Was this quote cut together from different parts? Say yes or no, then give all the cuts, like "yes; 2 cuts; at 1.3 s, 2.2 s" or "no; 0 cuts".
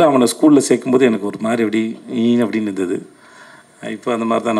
no; 0 cuts